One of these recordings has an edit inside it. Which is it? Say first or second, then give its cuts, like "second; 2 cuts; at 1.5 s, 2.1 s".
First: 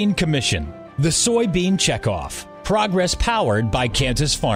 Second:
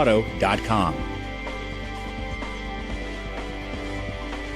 second; 1 cut; at 0.9 s